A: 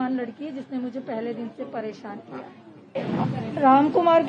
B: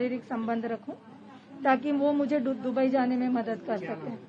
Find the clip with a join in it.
A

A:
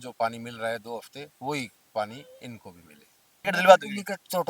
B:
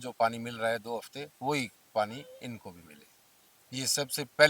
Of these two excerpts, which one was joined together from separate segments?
A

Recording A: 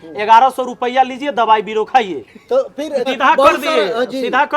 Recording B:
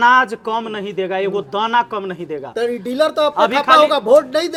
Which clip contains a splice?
A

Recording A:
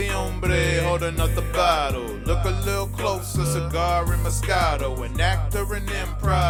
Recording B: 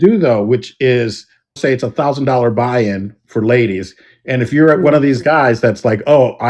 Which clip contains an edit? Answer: B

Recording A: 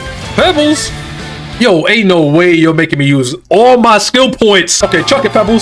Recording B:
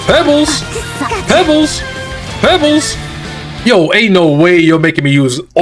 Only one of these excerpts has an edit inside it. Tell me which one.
A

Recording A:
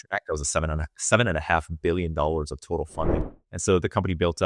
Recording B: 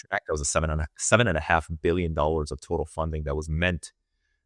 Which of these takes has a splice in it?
A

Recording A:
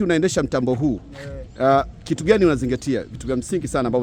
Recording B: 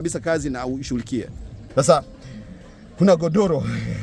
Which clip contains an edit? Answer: B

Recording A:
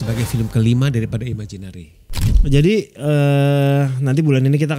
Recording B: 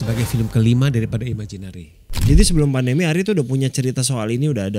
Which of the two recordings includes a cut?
B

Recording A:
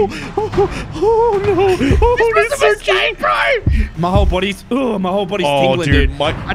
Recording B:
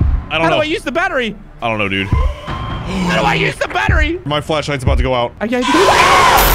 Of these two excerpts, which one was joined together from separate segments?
B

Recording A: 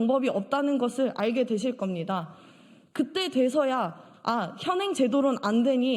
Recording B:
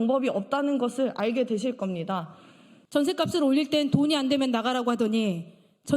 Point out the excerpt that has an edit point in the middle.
B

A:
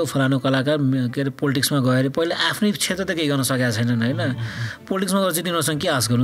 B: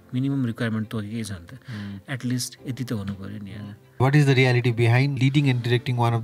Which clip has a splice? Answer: B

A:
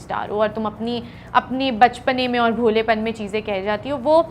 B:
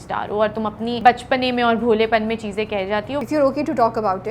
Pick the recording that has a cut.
B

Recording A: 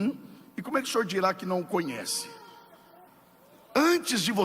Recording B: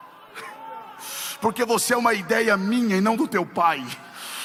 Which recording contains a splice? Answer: A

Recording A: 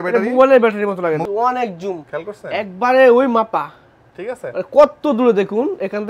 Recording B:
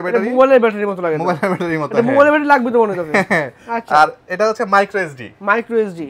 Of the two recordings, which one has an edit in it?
A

